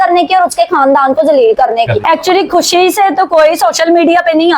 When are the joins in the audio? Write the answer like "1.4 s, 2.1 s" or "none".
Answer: 2.0 s